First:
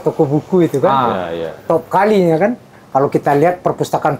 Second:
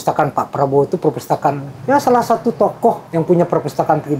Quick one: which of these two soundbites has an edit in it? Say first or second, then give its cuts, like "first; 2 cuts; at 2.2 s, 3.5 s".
second; 2 cuts; at 1.7 s, 3.0 s